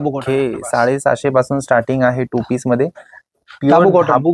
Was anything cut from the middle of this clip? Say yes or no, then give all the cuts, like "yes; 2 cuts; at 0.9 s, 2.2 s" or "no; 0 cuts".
no; 0 cuts